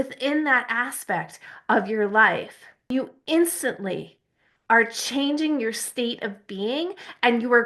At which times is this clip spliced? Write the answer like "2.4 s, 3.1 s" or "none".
2.9 s

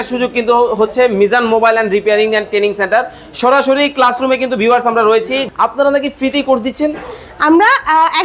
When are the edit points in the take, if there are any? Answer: 5.5 s

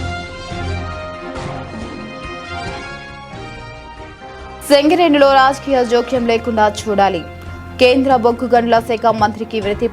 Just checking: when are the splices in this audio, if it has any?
4.6 s

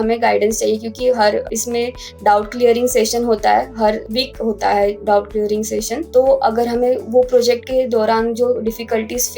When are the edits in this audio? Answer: 1.5 s, 4.0 s, 6.0 s

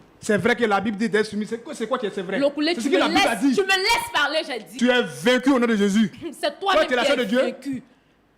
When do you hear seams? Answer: 4.6 s

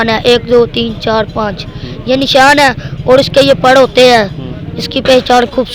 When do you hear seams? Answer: none

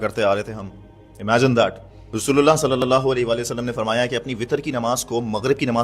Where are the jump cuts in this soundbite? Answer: 2.1 s

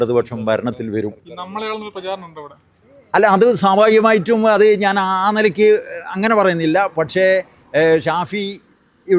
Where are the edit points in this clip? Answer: none

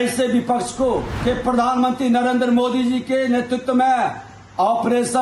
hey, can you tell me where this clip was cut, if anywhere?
1.1 s

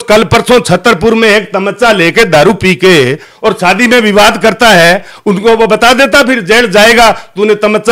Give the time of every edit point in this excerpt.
none

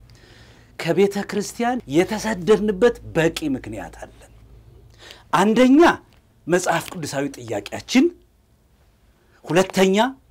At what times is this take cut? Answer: 1.8 s

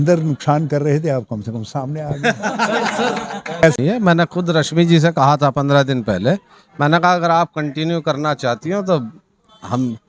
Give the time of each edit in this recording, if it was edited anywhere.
3.8 s

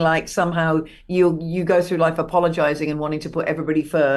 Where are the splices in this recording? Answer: none

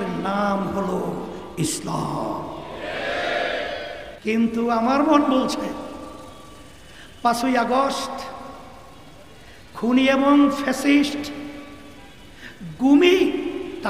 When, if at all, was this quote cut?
4.1 s

